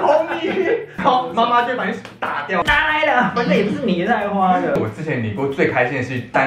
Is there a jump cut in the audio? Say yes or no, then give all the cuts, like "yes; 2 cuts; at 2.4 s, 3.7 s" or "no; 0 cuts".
yes; 3 cuts; at 1.0 s, 2.6 s, 4.8 s